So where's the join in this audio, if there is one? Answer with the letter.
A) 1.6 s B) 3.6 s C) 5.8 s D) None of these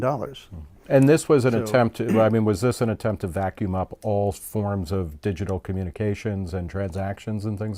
B